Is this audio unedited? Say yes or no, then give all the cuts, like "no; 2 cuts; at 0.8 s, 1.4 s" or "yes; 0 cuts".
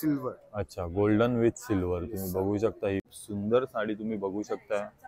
no; 1 cut; at 3.1 s